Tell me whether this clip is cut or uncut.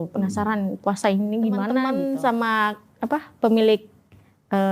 cut